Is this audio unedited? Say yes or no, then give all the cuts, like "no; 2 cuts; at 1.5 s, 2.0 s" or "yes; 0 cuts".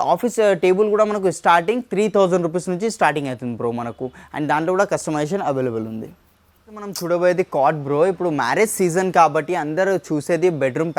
yes; 0 cuts